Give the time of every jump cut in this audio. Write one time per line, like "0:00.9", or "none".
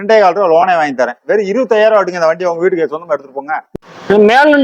0:03.6